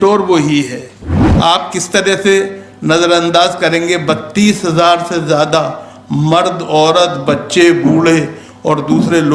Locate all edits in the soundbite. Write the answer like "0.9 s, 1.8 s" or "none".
1.2 s